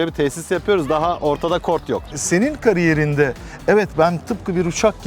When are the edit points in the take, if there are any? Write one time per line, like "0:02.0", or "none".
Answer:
0:02.2